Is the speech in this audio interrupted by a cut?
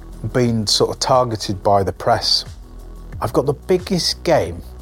yes; 1 cut; at 3.0 s

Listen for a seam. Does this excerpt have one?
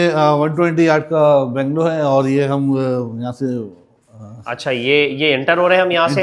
no; 0 cuts

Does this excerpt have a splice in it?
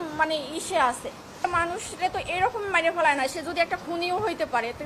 yes; 1 cut; at 1.4 s

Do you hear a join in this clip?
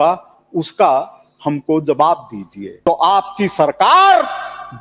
yes; 1 cut; at 2.7 s

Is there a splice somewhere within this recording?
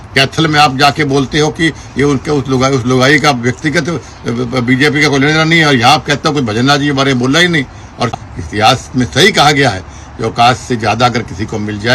yes; 1 cut; at 8.1 s

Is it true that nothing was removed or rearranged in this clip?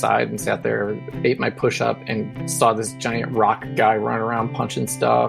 no; 1 cut; at 1.1 s

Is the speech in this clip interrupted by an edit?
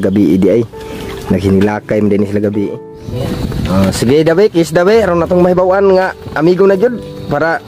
yes; 1 cut; at 3.1 s

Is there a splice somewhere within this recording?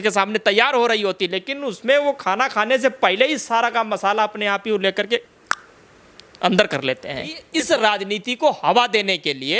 yes; 1 cut; at 7.4 s

